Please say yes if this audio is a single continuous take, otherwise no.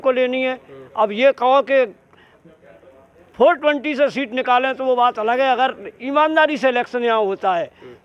yes